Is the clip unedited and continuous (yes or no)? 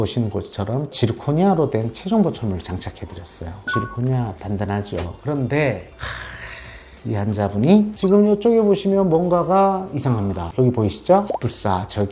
no